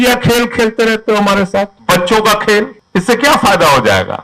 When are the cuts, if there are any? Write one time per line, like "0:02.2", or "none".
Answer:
0:01.8
0:02.8